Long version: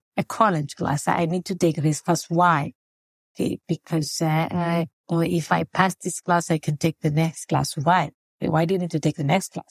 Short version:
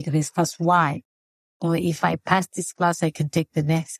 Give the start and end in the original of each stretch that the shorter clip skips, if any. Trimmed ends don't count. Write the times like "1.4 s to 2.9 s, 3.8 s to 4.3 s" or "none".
3.2 s to 5.0 s